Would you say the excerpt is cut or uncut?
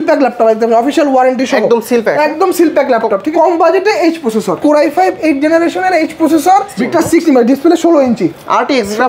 cut